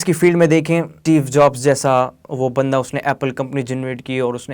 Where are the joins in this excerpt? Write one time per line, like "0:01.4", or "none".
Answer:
0:00.9